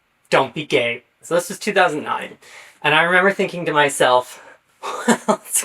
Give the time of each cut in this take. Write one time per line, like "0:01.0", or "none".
0:01.2